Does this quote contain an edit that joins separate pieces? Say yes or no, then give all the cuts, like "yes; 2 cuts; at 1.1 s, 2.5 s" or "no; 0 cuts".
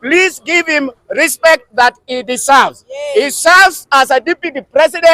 no; 0 cuts